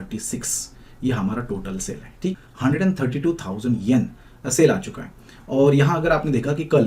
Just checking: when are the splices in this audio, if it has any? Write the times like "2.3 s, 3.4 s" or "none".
2.4 s